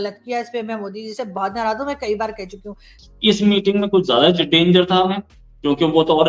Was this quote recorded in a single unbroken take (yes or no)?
no